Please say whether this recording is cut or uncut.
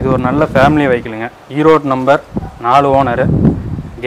uncut